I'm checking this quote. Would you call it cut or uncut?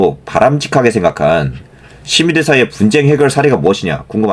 uncut